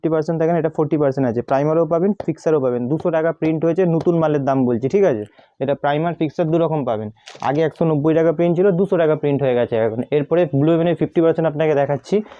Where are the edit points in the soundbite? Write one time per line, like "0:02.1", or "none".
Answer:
none